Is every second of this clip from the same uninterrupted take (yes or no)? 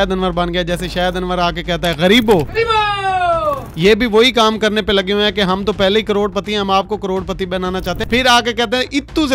no